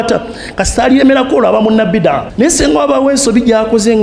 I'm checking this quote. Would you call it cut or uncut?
cut